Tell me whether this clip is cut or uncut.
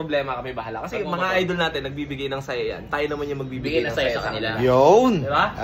uncut